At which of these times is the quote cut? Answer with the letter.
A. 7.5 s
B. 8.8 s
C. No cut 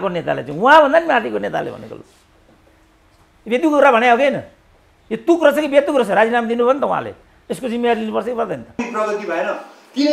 B